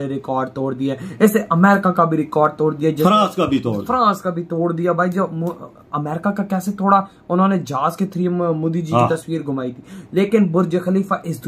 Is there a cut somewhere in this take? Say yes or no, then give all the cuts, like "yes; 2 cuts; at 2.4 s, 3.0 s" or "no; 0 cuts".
no; 0 cuts